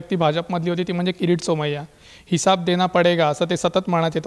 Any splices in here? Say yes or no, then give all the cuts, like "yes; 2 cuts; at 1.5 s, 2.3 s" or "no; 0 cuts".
no; 0 cuts